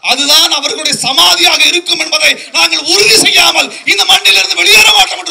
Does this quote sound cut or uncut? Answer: uncut